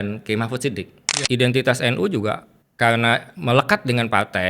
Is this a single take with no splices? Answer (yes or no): no